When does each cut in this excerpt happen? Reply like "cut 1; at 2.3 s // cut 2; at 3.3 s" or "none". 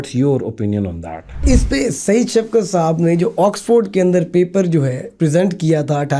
cut 1; at 1.4 s